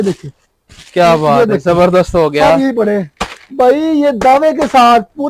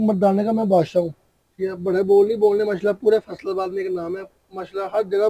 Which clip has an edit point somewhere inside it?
first; 1 cut; at 3.2 s

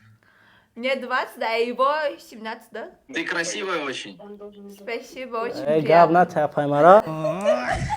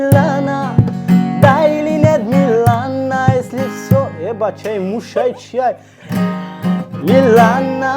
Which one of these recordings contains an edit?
first; 1 cut; at 3.0 s

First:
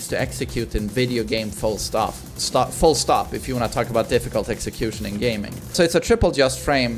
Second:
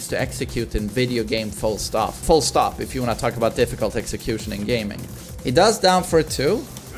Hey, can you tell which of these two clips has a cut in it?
second; 2 cuts; at 2.2 s, 5.0 s

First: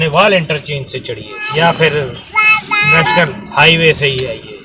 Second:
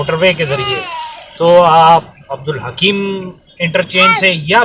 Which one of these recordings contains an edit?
first; 1 cut; at 1.3 s

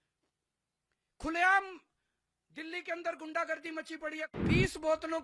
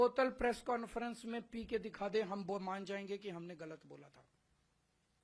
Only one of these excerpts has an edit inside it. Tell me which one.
first; 1 cut; at 4.3 s

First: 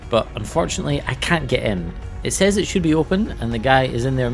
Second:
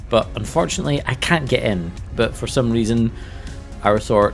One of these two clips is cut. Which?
second; 1 cut; at 2.1 s

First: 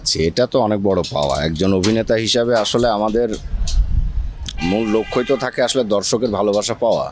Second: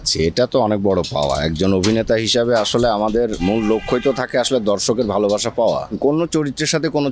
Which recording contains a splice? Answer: second; 2 cuts; at 3.4 s, 5.9 s

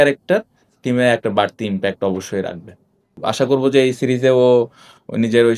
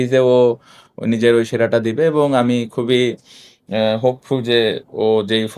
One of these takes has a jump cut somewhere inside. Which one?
first; 1 cut; at 3.2 s

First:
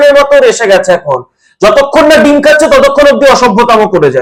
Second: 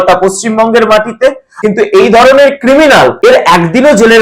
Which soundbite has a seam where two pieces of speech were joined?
second; 2 cuts; at 1.5 s, 3.2 s

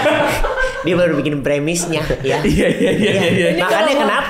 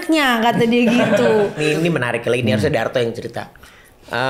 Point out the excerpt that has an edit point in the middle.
second; 1 cut; at 1.6 s

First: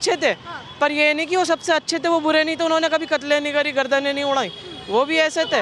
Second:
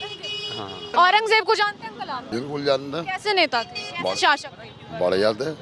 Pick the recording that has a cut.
second; 2 cuts; at 0.8 s, 2.2 s

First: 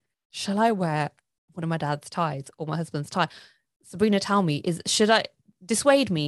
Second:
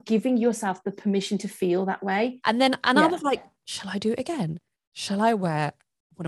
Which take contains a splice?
second; 1 cut; at 2.4 s

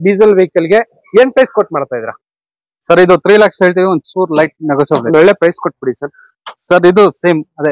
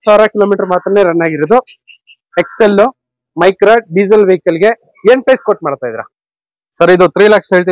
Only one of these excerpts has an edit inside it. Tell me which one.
first; 1 cut; at 5.0 s

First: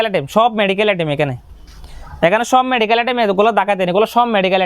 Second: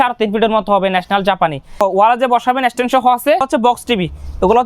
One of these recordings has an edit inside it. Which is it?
second; 2 cuts; at 1.8 s, 3.5 s

